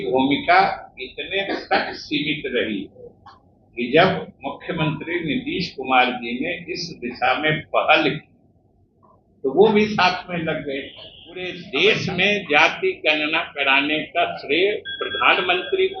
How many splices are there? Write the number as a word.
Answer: one